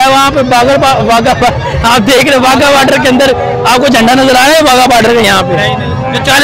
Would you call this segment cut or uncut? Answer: uncut